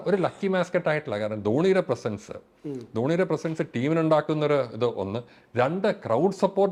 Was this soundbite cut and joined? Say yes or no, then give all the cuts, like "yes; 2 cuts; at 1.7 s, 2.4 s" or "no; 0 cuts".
no; 0 cuts